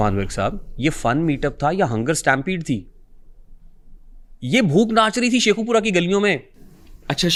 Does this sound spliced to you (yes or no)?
no